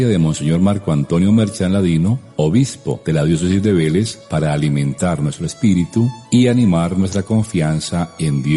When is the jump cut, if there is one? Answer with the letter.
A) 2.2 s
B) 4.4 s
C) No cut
C